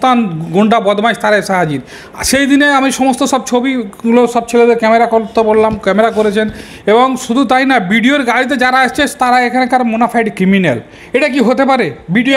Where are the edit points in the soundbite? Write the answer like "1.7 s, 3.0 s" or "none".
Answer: none